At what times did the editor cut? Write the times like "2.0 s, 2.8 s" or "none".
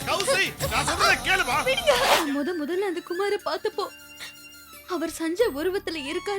2.2 s